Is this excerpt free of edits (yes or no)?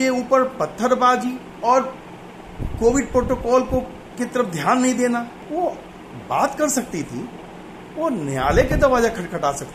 no